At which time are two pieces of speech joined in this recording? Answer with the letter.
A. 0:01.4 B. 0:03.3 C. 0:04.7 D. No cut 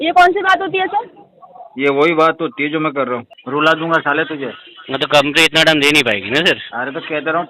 B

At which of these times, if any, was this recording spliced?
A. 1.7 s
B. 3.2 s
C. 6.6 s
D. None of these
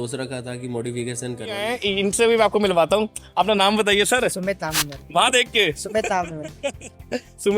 A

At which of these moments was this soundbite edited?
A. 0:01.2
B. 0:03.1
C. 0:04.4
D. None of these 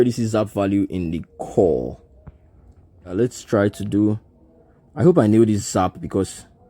B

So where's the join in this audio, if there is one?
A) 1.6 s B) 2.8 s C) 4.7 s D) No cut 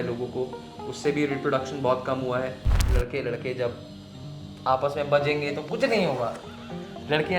B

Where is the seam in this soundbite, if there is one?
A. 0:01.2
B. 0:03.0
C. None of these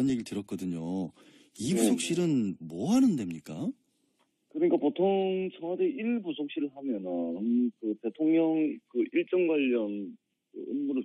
B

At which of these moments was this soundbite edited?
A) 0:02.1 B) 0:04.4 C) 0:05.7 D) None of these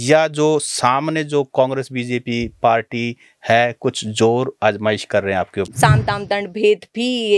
C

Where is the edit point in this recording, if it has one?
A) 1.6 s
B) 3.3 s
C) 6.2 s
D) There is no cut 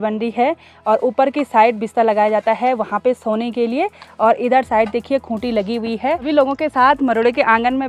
C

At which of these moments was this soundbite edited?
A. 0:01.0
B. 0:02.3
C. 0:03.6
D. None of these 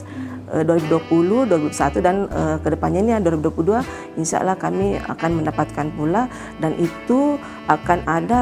D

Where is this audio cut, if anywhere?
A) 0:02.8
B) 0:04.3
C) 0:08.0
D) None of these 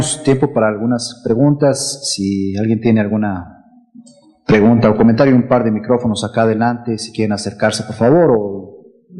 D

